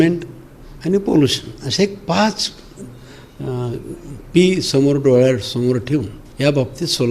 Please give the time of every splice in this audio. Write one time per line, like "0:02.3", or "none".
0:06.2